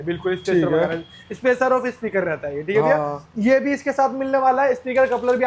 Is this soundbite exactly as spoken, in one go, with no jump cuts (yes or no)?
yes